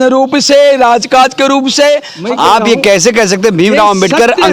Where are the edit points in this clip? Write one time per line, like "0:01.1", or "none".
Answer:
0:02.1